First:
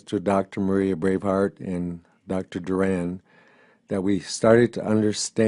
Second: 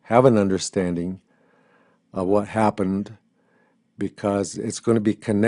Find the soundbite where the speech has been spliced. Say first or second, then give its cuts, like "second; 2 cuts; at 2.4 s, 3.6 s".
first; 1 cut; at 2.5 s